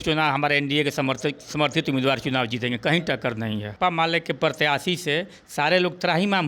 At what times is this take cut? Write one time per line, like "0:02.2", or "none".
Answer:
0:03.7